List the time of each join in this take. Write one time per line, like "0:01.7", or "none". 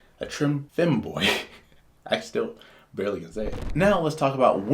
0:03.6